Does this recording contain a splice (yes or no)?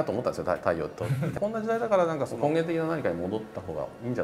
yes